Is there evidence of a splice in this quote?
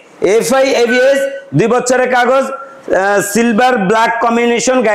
no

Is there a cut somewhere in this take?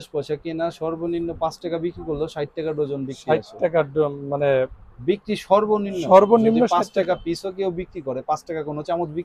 no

